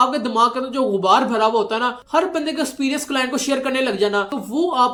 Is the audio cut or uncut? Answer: uncut